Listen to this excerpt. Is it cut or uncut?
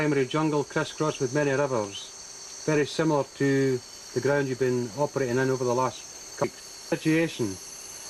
uncut